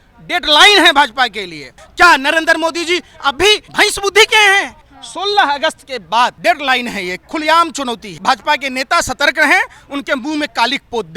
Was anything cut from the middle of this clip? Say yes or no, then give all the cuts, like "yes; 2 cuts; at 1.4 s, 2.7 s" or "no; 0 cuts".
yes; 5 cuts; at 1.8 s, 3.7 s, 4.8 s, 6.4 s, 8.1 s